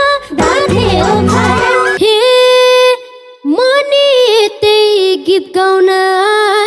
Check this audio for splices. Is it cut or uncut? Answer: cut